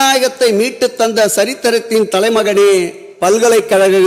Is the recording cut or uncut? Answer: uncut